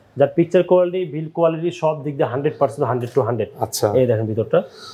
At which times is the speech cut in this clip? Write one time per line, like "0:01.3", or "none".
none